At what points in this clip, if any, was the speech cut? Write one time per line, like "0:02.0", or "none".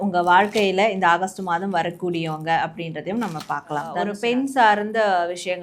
0:04.1